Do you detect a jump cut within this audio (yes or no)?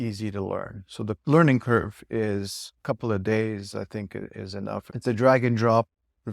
yes